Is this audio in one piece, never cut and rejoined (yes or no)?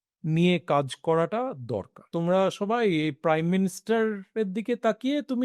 no